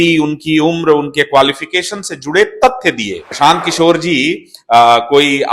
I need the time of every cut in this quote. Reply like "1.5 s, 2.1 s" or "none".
3.3 s